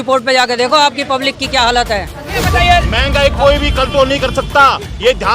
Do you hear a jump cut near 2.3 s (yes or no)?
yes